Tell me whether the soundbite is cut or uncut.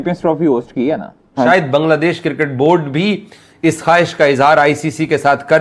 cut